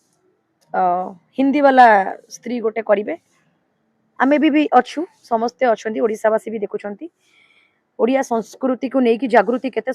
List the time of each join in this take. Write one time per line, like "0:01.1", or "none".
none